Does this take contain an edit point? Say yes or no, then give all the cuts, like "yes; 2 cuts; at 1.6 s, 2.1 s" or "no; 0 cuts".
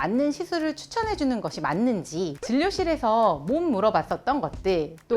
yes; 1 cut; at 2.4 s